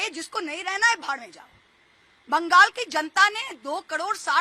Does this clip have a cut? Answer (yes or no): no